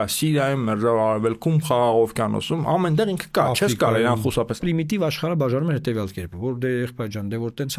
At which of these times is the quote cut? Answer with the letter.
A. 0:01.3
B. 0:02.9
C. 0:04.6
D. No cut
C